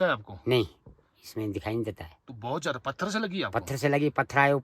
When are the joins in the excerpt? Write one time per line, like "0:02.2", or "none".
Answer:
none